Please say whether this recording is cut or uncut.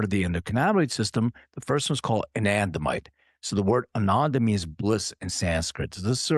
uncut